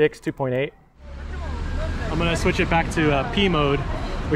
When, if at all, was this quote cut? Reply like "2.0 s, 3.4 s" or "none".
1.1 s